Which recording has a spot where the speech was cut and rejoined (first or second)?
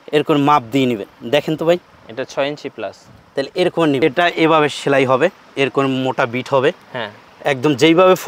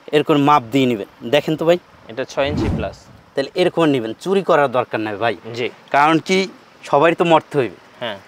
first